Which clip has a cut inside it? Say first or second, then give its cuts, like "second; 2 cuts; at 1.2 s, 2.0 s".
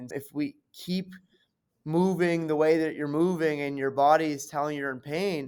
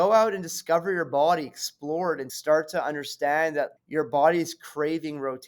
second; 2 cuts; at 2.3 s, 3.7 s